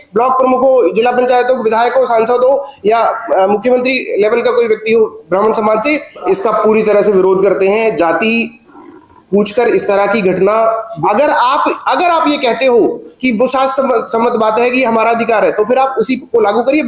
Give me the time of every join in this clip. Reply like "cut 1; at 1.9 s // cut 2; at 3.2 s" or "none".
cut 1; at 6.2 s // cut 2; at 10.9 s